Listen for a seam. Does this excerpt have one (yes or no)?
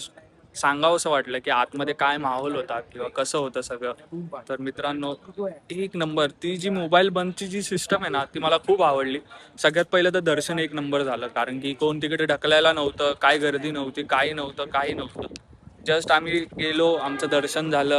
no